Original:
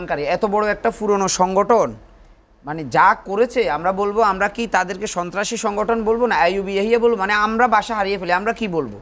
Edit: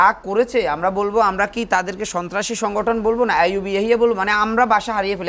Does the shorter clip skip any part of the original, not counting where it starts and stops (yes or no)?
no